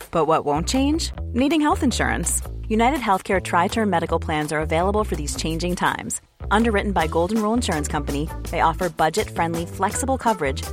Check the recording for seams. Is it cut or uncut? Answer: uncut